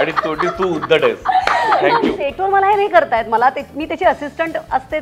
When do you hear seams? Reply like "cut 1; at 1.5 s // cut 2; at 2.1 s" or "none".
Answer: cut 1; at 2.2 s